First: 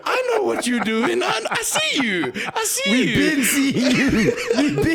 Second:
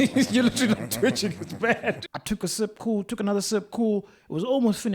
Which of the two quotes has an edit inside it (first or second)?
second